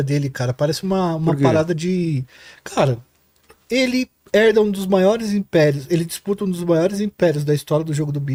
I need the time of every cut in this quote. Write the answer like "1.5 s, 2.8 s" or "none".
none